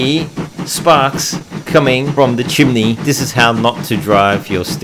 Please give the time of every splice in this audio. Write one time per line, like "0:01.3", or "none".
0:02.1
0:03.0

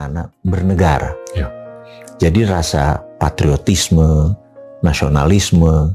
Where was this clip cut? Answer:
none

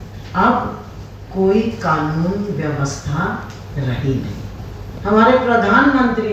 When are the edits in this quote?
0:04.9

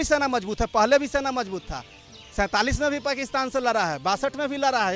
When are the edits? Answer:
none

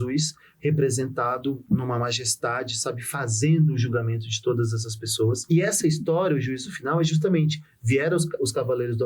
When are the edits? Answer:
0:05.4

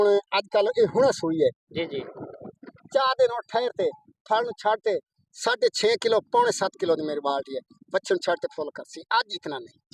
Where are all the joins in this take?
none

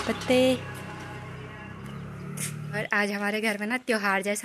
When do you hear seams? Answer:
0:02.8

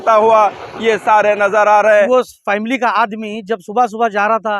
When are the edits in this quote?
0:02.1

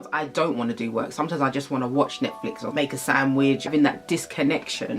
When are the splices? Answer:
0:02.7
0:03.7

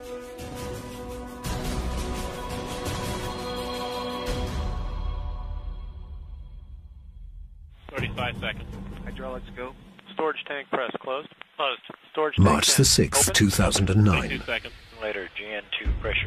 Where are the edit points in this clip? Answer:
0:04.6

